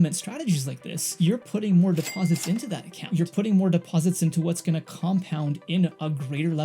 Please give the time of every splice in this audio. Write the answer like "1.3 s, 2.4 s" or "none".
1.0 s